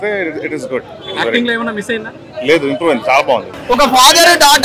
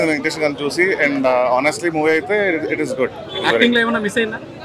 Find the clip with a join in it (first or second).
first